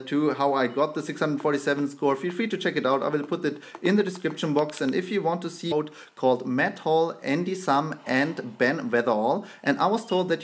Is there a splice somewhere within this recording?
no; 0 cuts

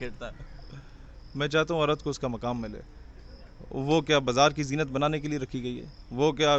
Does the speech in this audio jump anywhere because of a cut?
no; 0 cuts

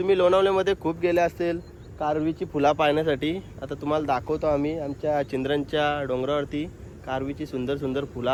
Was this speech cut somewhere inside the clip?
no; 0 cuts

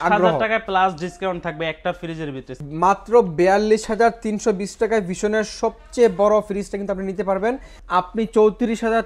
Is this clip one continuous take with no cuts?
no; 2 cuts; at 2.5 s, 7.7 s

